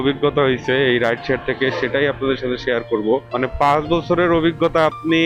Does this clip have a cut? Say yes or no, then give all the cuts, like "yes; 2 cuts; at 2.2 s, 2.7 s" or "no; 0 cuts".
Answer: no; 0 cuts